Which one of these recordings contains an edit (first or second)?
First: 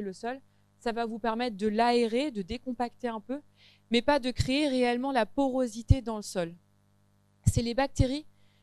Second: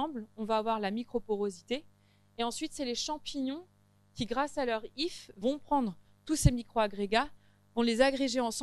second